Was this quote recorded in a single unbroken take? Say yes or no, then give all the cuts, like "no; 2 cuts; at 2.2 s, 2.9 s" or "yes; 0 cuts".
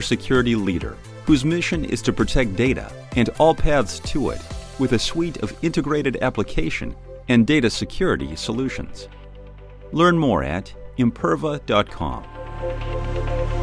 no; 1 cut; at 12.4 s